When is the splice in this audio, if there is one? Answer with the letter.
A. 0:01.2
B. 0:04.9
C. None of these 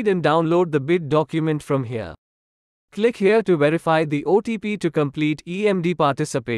B